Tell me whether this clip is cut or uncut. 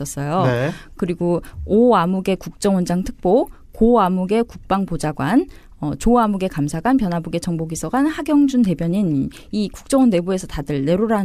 uncut